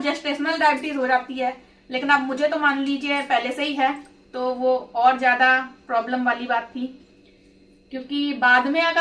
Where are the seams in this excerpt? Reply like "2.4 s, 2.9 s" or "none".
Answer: none